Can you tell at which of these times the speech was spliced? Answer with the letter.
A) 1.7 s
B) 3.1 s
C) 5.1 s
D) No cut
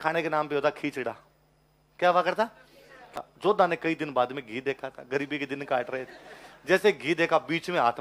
B